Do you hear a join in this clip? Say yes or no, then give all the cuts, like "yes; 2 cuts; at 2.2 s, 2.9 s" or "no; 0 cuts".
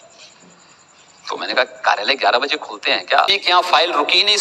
yes; 1 cut; at 3.4 s